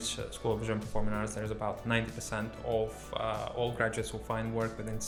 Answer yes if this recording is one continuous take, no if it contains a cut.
yes